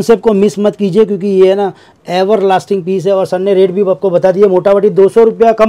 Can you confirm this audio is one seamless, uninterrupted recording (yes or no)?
yes